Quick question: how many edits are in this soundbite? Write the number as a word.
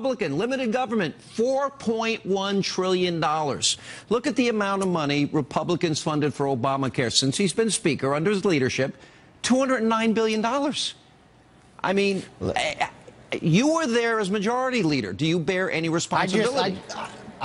zero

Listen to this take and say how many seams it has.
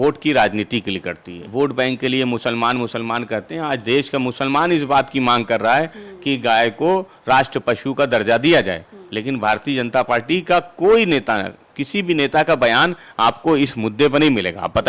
one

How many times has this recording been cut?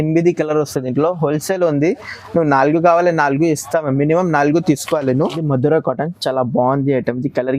one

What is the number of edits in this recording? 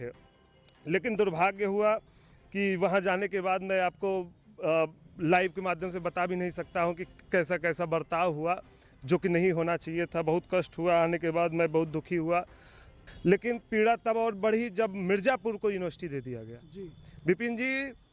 one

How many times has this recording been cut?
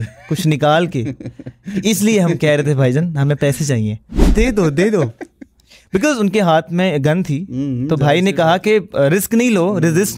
one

